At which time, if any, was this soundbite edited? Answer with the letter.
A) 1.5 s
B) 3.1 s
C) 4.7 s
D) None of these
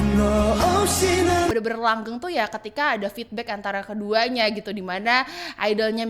A